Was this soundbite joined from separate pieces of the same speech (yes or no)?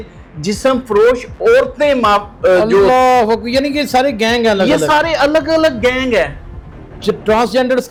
no